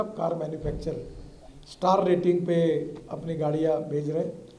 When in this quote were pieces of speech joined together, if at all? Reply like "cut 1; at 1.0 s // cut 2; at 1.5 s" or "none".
none